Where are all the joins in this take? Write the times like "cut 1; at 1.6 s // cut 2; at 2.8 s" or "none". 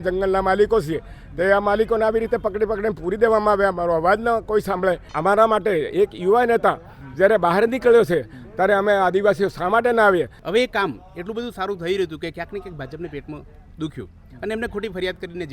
cut 1; at 5.1 s // cut 2; at 10.4 s